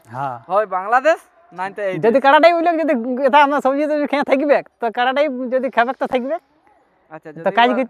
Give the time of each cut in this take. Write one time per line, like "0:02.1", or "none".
none